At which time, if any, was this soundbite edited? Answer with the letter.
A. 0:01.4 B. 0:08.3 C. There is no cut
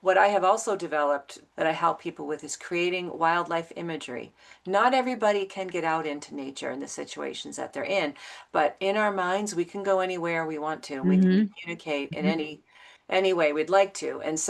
A